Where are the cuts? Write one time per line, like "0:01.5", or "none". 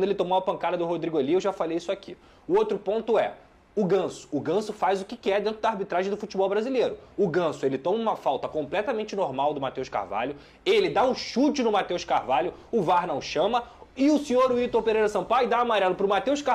none